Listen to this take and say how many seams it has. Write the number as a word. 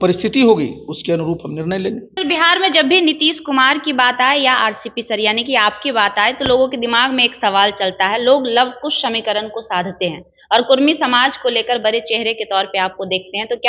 one